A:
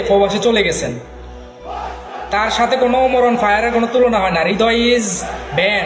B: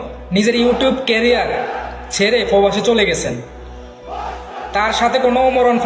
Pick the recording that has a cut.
A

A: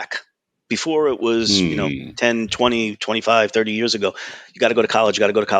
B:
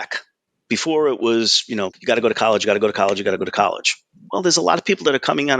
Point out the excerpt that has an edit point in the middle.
B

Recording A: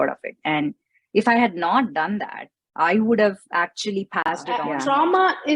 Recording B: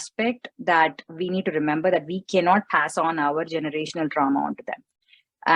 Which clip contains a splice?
A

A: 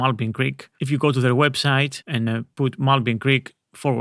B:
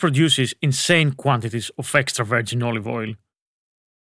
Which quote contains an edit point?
A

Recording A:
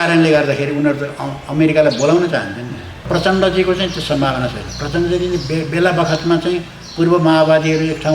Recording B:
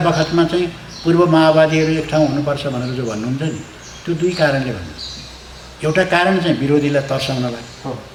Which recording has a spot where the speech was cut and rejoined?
A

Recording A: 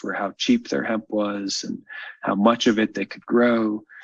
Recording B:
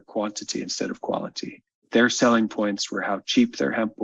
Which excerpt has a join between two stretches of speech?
B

